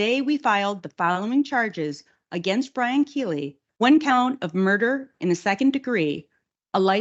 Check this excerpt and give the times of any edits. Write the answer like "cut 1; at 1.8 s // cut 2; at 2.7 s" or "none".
cut 1; at 3.6 s